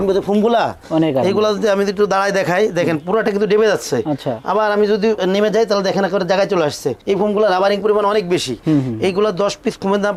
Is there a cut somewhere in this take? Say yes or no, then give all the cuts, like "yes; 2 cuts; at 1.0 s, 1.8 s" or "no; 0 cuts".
no; 0 cuts